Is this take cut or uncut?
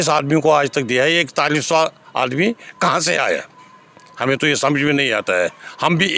uncut